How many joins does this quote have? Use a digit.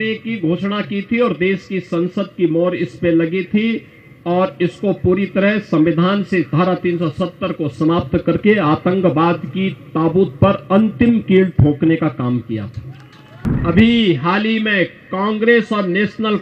1